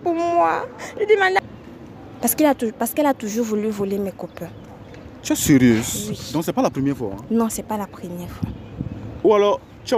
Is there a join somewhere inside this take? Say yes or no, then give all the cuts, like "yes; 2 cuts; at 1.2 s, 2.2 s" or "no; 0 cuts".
yes; 1 cut; at 1.4 s